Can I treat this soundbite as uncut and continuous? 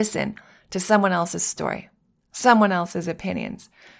yes; 0 cuts

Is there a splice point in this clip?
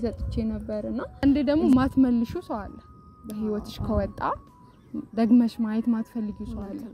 yes; 1 cut; at 1.2 s

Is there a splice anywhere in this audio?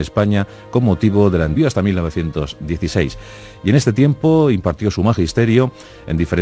no; 0 cuts

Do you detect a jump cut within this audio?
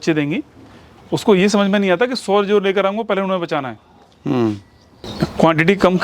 no; 0 cuts

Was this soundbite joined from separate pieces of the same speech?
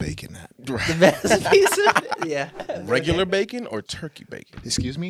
yes; 1 cut; at 2.6 s

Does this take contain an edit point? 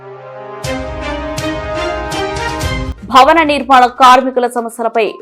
yes; 1 cut; at 2.9 s

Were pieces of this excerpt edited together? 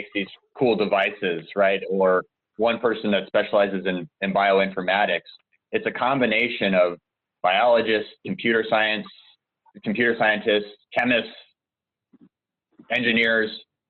yes; 1 cut; at 10.8 s

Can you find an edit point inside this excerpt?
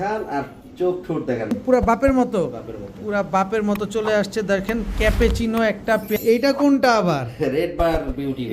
yes; 2 cuts; at 1.5 s, 6.2 s

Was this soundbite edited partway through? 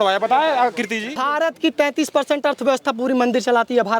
yes; 1 cut; at 1.2 s

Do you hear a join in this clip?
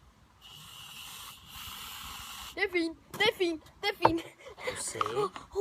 no; 0 cuts

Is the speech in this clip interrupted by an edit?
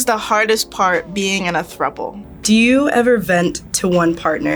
yes; 1 cut; at 2.3 s

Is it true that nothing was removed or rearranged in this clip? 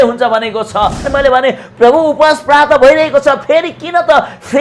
no; 1 cut; at 1.0 s

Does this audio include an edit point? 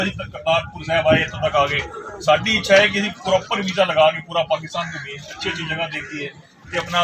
no; 0 cuts

